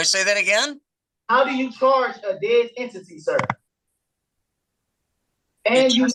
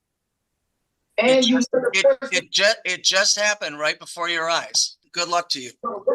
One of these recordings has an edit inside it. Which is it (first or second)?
second